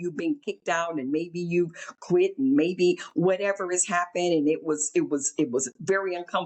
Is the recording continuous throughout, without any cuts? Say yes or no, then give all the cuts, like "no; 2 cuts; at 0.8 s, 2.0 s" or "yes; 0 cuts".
yes; 0 cuts